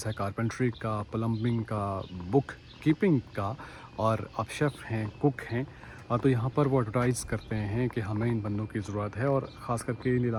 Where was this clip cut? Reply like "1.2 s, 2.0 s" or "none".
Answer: none